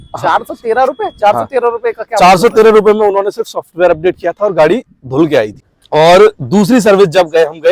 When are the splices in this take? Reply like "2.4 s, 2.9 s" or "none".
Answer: 5.7 s